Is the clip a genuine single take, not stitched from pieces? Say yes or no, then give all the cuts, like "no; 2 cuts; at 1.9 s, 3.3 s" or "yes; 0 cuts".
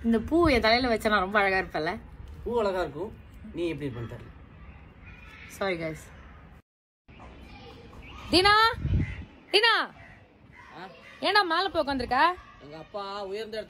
yes; 0 cuts